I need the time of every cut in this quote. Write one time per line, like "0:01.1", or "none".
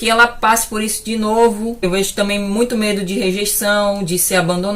0:01.8